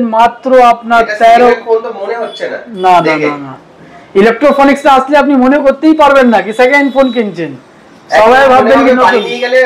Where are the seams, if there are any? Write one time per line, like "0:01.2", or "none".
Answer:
none

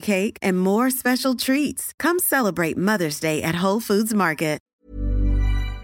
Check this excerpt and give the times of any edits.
0:04.7

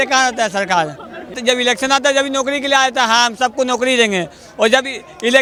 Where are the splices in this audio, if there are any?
none

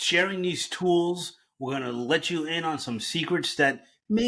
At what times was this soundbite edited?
none

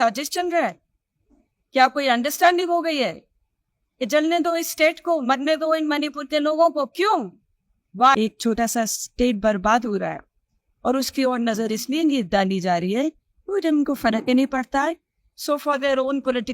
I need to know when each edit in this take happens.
0:08.1

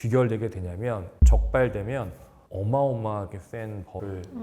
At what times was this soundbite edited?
0:01.1

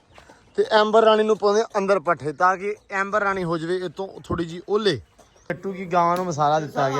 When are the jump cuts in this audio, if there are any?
0:05.5

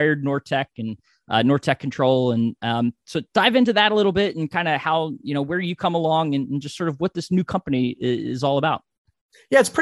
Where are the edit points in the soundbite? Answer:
none

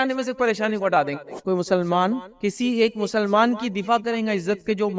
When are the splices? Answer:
0:01.3
0:02.3

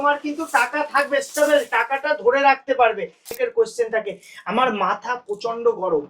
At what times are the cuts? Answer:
0:03.3

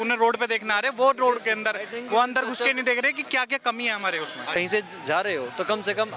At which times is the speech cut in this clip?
0:04.6

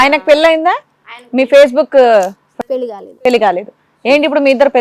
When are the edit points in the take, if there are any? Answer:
none

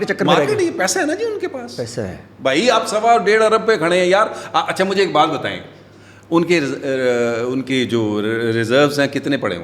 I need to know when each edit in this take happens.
none

